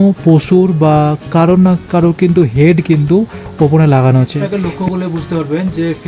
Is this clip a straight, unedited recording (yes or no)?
no